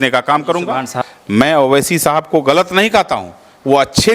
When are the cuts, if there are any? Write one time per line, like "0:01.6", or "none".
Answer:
0:00.9